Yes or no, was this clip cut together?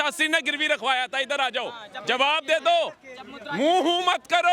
no